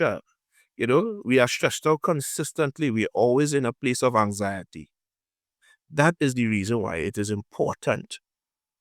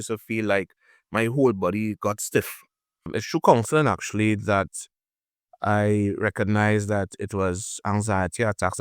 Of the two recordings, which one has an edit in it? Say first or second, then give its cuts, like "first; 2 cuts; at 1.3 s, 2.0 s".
second; 1 cut; at 3.2 s